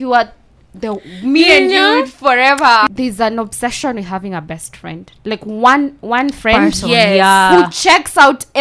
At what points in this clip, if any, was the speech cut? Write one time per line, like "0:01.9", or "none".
0:02.9